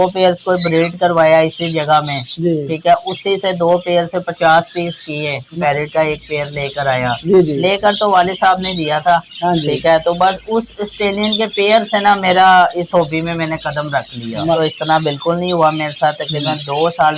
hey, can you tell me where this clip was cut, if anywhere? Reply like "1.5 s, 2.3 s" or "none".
5.5 s, 14.6 s

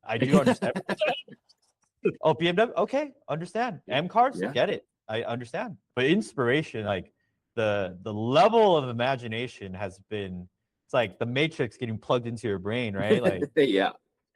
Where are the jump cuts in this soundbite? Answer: 5.7 s

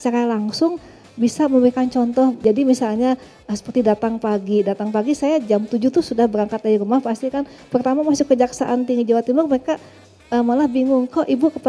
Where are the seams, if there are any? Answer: 2.4 s

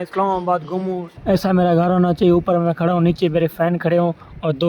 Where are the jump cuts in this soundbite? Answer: 1.1 s

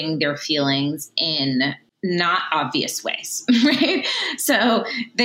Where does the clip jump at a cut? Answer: 1.9 s

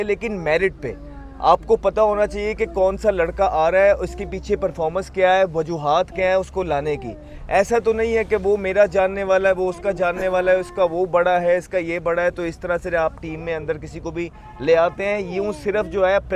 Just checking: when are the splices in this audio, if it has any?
none

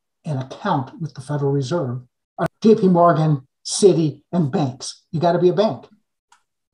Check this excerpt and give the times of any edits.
2.4 s

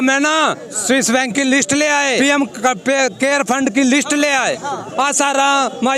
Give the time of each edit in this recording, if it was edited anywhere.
2.2 s, 4.9 s

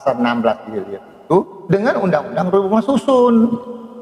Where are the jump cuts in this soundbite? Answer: none

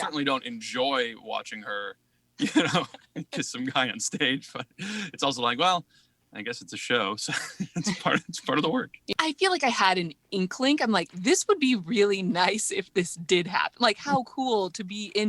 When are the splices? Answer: 9.1 s, 10.2 s

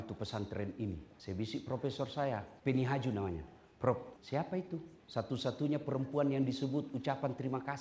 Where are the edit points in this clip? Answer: 1.1 s, 2.5 s, 4.6 s

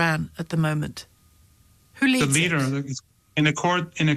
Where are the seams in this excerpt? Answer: none

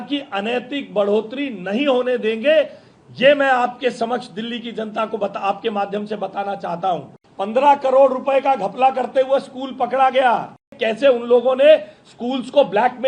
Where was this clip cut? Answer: 7.2 s, 10.7 s

